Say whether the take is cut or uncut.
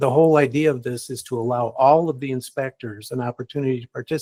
uncut